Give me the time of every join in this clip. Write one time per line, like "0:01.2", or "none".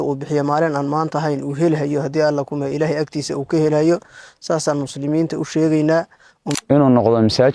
0:06.6